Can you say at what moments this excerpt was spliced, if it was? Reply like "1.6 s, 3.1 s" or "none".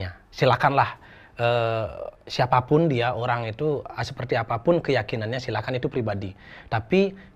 none

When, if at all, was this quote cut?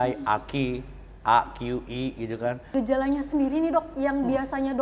2.7 s

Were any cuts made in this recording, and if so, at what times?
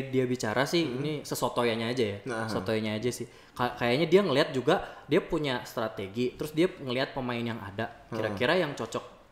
none

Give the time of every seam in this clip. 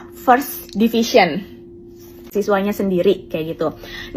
2.3 s

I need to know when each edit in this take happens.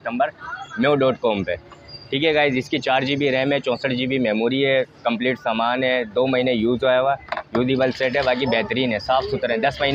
none

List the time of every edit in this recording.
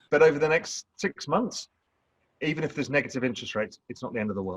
none

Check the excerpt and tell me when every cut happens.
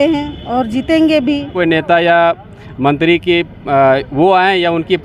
1.5 s

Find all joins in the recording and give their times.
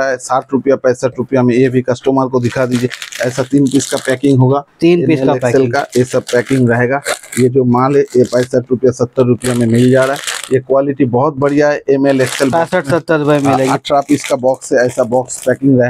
none

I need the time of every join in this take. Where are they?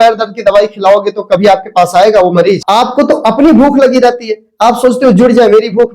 2.6 s

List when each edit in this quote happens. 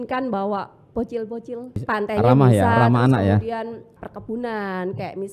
1.8 s, 3.9 s

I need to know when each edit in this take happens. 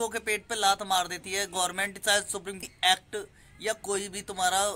2.6 s

